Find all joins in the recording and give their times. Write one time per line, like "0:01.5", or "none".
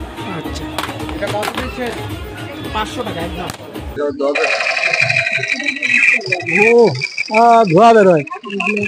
0:04.0